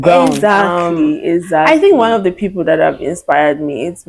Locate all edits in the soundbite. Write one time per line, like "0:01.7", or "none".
0:01.7